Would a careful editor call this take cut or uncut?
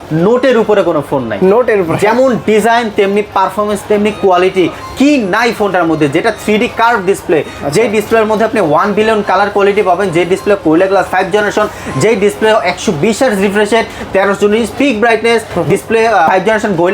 uncut